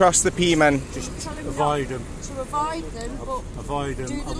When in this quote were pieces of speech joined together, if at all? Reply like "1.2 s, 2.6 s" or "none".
none